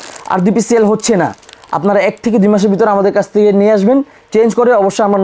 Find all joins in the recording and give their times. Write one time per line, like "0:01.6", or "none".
none